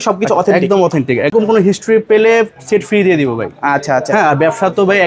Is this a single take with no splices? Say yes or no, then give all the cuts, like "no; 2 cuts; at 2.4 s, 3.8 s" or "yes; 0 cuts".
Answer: no; 1 cut; at 1.3 s